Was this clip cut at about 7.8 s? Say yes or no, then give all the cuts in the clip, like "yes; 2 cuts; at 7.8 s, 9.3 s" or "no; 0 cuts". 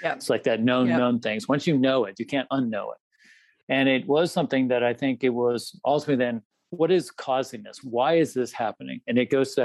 yes; 2 cuts; at 6.4 s, 7.8 s